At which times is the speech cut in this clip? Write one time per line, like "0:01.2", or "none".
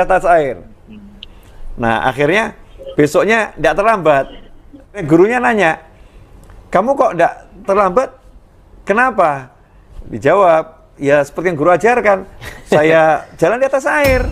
0:05.0